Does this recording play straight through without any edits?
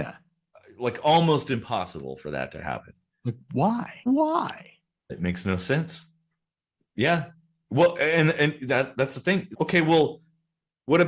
yes; 0 cuts

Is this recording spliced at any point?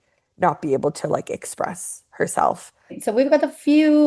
yes; 1 cut; at 3.0 s

